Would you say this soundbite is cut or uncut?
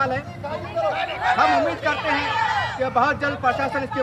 uncut